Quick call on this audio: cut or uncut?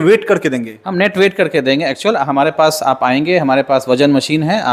uncut